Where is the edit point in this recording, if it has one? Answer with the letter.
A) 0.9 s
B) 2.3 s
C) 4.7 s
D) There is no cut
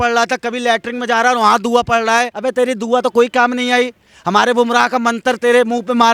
B